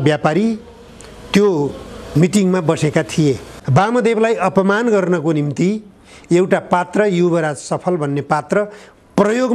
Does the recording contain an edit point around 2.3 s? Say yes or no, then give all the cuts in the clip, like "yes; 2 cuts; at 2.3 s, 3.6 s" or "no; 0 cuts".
no; 1 cut; at 3.5 s